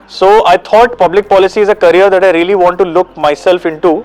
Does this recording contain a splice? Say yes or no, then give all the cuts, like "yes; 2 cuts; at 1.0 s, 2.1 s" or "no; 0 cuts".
no; 0 cuts